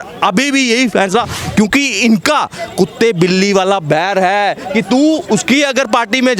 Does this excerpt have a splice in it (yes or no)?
yes